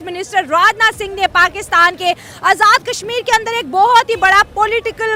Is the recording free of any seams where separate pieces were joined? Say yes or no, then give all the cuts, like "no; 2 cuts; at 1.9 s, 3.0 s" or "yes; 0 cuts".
yes; 0 cuts